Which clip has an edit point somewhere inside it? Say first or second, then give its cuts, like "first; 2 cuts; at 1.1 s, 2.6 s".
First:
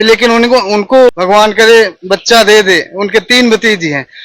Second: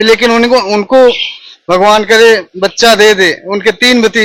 first; 1 cut; at 1.2 s